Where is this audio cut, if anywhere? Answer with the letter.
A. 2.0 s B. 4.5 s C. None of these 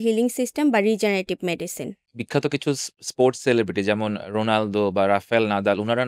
A